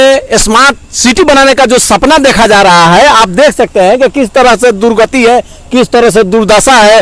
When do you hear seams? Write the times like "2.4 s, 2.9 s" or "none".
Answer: none